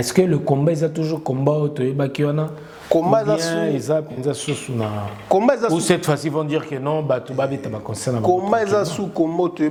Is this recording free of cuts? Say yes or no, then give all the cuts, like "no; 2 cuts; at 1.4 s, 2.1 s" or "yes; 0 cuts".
yes; 0 cuts